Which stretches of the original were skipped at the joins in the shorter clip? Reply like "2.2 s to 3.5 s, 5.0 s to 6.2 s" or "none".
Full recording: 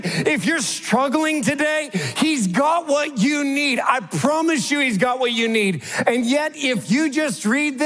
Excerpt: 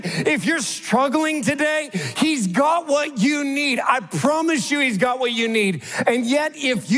none

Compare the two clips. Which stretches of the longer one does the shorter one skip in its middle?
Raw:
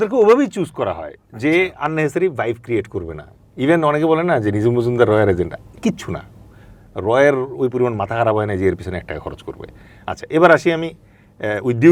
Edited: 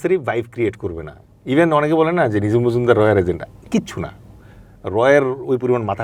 none

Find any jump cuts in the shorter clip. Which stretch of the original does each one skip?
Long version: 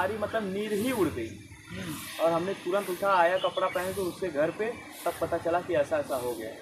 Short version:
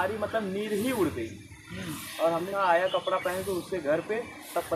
2.5 s to 3.0 s

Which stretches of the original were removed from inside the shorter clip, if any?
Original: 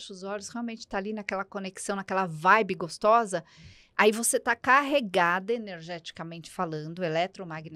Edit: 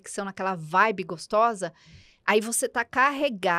none

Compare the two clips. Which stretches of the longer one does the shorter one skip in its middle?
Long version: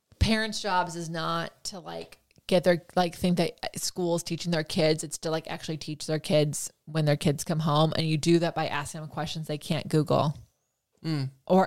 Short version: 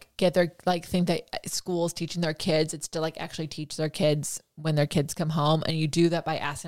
none

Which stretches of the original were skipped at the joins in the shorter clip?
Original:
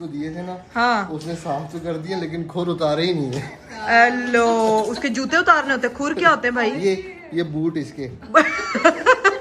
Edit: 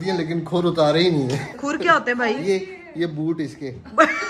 3.6 s to 5.9 s

